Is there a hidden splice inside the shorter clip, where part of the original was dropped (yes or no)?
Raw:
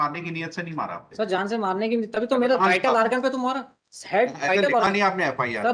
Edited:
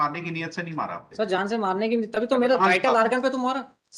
no